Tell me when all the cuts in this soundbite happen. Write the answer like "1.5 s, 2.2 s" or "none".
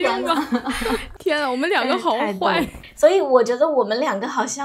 1.1 s, 2.8 s